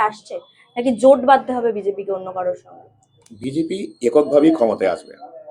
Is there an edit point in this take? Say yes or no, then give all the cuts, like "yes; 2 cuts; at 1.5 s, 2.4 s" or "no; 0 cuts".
no; 0 cuts